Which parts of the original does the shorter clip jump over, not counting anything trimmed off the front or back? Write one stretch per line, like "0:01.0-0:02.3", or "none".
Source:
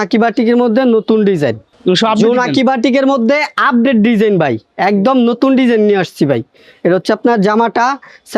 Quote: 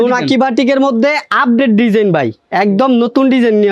none